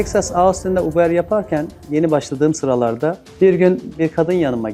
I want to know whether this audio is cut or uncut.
uncut